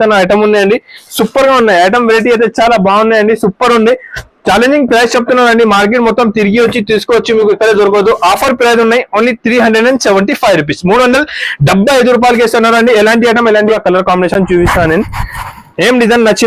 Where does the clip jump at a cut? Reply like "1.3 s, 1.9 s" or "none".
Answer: 13.8 s